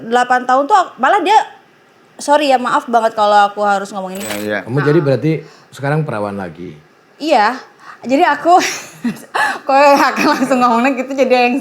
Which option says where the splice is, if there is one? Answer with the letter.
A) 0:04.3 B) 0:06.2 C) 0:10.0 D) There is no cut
A